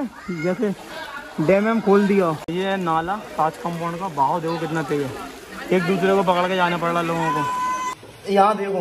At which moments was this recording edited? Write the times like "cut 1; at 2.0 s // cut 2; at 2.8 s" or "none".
cut 1; at 2.4 s // cut 2; at 7.9 s